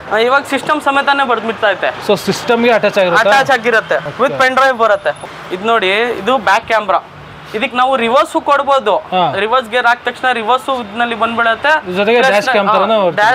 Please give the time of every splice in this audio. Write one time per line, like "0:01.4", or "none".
0:04.1
0:05.2